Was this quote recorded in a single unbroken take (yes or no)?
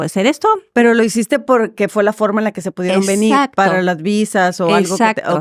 yes